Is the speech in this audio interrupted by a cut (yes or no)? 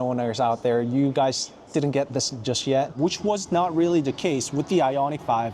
yes